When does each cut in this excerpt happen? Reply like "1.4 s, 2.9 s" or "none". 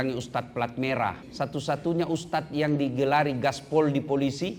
1.2 s